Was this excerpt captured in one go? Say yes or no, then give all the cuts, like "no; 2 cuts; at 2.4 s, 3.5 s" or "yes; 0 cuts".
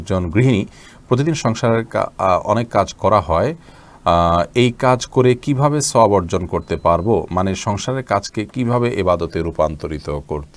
yes; 0 cuts